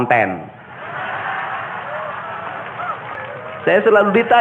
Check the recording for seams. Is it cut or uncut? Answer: cut